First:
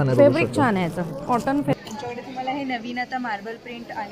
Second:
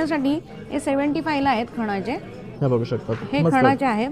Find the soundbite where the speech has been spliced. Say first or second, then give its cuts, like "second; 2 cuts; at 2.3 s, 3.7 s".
first; 1 cut; at 1.7 s